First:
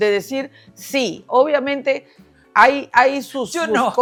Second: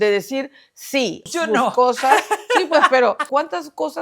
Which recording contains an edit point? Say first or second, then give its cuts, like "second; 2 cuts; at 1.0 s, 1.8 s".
second; 2 cuts; at 1.2 s, 3.2 s